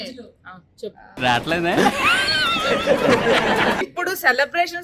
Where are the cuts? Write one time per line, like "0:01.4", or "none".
0:03.9